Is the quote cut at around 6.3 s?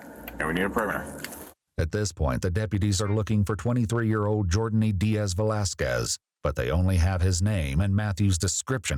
no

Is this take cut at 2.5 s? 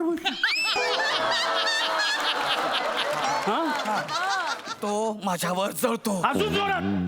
no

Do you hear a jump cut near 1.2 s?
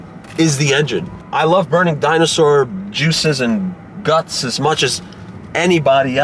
yes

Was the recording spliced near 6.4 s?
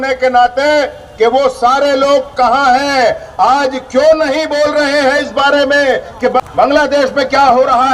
yes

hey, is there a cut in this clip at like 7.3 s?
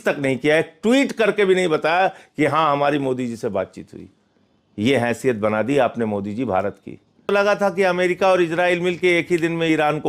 yes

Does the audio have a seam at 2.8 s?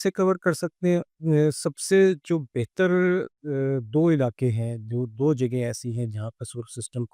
no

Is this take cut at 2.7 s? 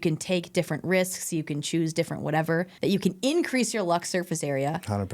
yes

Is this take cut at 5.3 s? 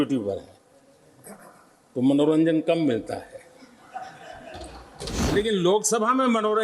yes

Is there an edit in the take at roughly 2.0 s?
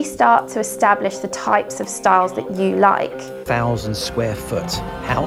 no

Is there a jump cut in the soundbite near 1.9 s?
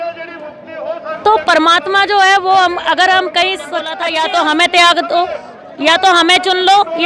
no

